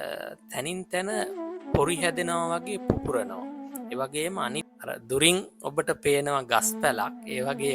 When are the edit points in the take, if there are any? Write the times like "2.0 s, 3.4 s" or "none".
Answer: 4.7 s